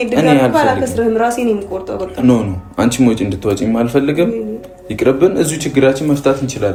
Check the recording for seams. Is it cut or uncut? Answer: uncut